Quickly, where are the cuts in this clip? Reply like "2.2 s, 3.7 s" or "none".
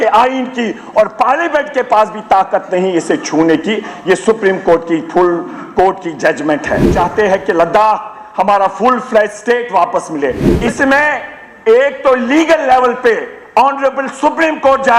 6.9 s, 10.5 s